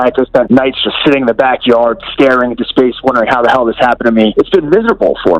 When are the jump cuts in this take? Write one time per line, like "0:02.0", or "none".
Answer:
0:04.3